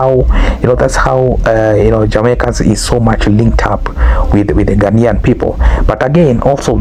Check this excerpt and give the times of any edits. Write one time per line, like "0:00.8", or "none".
none